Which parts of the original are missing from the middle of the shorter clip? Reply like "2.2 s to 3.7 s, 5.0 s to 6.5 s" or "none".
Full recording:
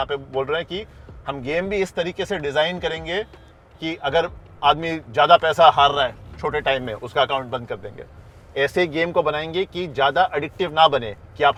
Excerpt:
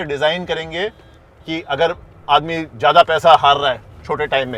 none